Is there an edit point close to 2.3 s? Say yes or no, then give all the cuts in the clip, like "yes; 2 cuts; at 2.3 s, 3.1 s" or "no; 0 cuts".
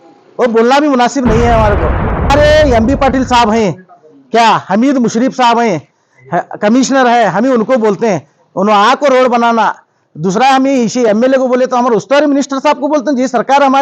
yes; 1 cut; at 2.3 s